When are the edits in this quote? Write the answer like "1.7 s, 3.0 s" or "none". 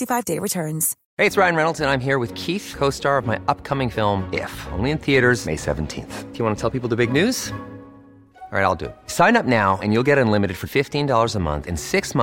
1.0 s